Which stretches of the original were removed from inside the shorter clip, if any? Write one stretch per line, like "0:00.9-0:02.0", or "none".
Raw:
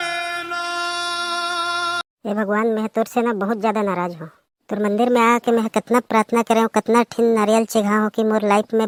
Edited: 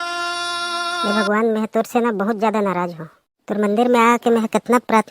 0:01.6-0:02.2